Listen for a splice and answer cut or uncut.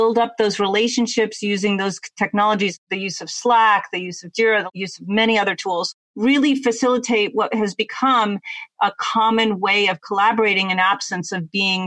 cut